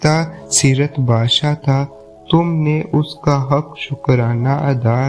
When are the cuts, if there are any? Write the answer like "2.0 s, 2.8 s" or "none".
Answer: none